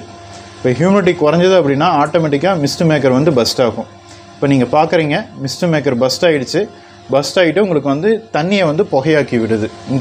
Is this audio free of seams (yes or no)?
yes